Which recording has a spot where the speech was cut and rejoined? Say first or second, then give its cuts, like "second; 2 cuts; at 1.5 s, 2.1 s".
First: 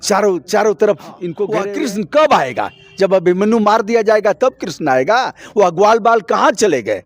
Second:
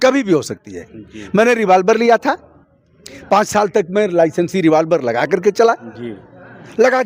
first; 1 cut; at 1.6 s